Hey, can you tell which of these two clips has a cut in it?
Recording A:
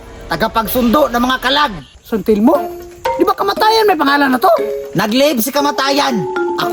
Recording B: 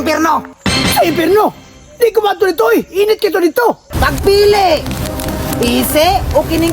B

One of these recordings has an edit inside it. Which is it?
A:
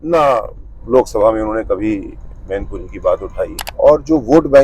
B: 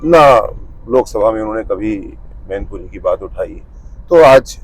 A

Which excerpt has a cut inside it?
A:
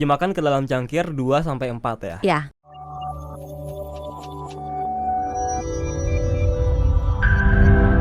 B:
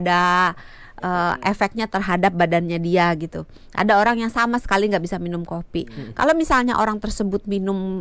A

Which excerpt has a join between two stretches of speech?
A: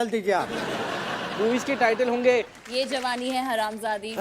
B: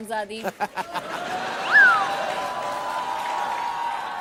A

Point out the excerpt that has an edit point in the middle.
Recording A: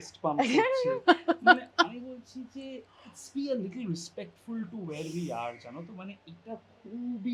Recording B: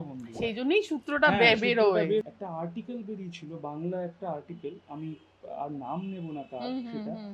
B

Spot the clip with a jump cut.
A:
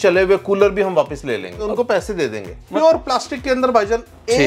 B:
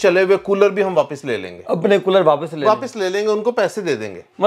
A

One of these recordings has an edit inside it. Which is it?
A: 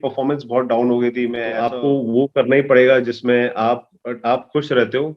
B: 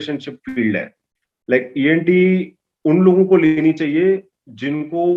A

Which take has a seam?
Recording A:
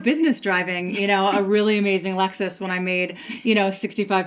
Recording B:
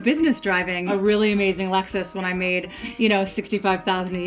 B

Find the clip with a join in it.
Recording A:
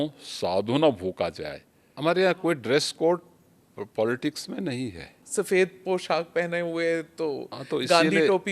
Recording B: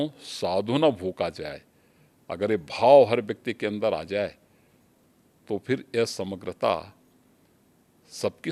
A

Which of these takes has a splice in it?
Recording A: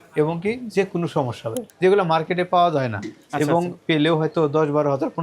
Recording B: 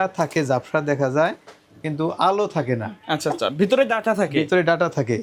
A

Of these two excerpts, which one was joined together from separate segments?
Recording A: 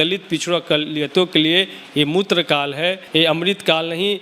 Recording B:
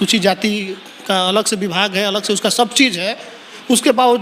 A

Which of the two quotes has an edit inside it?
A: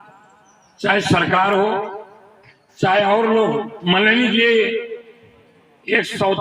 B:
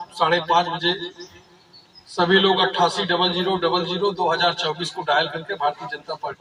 A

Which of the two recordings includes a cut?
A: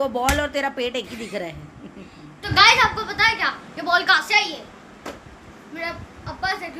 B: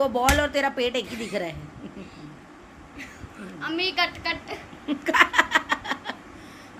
A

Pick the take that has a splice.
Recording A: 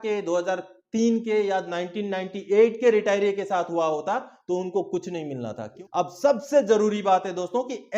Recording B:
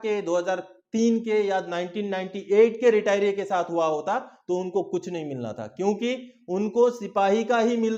A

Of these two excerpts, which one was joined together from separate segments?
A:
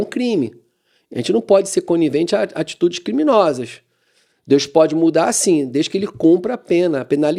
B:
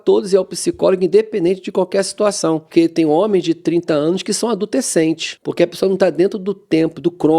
B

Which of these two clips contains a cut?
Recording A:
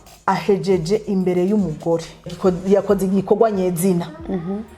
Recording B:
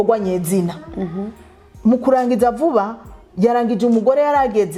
A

